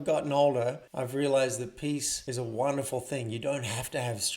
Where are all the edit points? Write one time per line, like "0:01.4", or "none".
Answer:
0:00.9
0:02.2

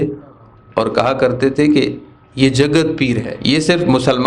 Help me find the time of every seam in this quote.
0:03.3

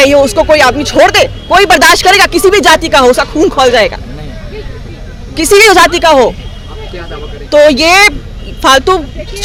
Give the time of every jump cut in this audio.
none

